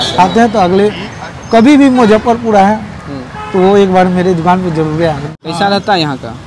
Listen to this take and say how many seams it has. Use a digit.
1